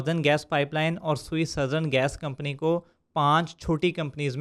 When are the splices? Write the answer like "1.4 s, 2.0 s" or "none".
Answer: none